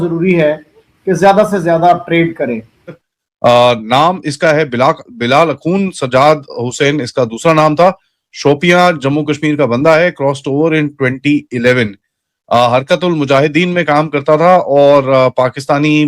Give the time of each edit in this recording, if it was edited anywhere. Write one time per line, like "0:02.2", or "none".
0:03.1